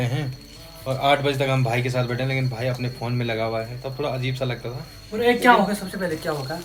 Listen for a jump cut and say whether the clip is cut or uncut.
uncut